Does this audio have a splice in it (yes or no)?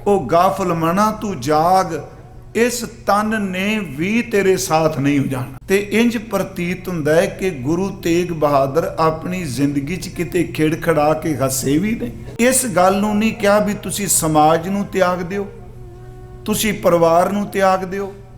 yes